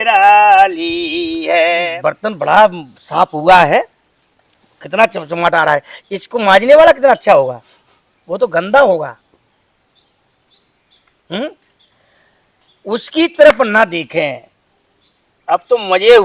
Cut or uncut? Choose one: cut